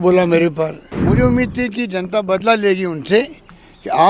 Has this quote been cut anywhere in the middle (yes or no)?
yes